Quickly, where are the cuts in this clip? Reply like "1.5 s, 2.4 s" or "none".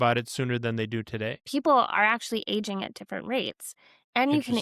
1.4 s